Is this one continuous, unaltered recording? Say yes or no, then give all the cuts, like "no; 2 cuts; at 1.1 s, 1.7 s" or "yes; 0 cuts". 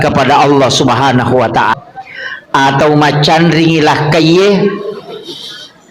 no; 1 cut; at 1.7 s